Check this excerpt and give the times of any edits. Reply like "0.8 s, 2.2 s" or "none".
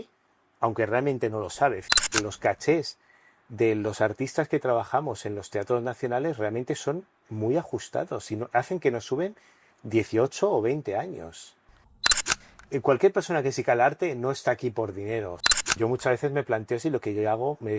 2.0 s, 12.2 s, 15.8 s